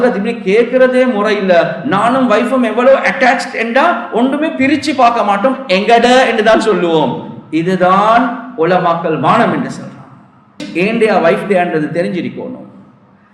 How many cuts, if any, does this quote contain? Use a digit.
1